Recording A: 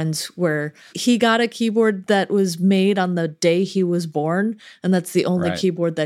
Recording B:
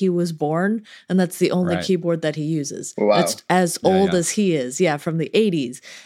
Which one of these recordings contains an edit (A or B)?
A